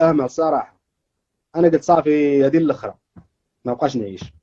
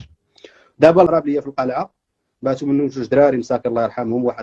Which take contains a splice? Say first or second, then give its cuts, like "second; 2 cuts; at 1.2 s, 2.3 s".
second; 1 cut; at 1.1 s